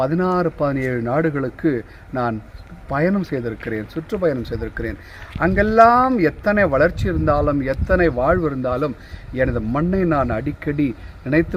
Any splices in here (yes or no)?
no